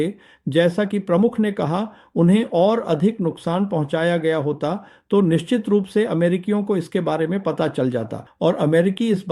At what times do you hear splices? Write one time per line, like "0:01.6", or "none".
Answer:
0:08.3